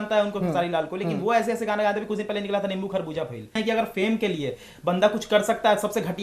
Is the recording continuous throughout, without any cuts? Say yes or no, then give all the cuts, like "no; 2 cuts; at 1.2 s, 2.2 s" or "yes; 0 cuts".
no; 1 cut; at 3.6 s